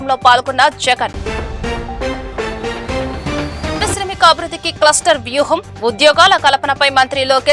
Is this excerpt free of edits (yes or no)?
yes